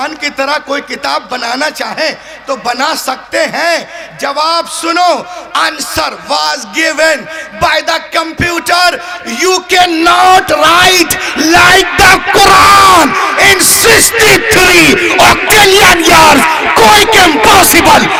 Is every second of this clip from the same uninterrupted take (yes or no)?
yes